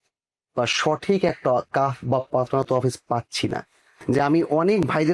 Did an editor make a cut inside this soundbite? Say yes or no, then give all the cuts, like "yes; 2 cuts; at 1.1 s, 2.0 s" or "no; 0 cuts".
yes; 1 cut; at 3.9 s